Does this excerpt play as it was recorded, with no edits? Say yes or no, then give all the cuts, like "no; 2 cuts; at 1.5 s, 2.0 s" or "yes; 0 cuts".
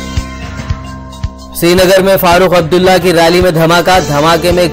no; 1 cut; at 1.0 s